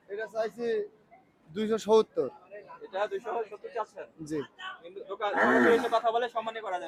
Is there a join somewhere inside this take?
no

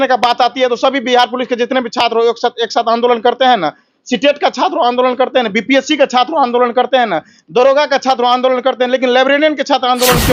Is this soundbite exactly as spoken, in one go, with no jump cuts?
yes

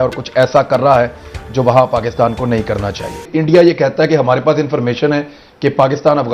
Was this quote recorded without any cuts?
no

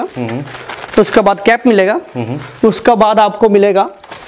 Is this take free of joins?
yes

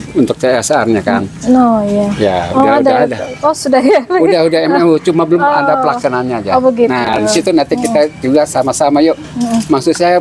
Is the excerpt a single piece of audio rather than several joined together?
yes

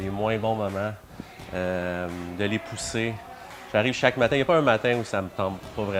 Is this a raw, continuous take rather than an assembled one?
yes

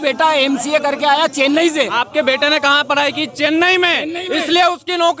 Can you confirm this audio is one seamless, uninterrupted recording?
no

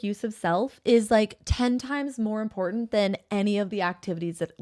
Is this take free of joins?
yes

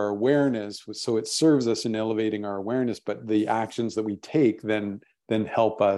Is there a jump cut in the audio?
no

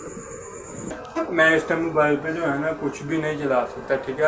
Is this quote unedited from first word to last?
no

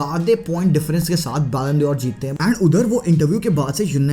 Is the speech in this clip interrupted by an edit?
yes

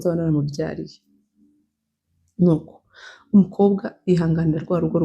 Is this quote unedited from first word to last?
yes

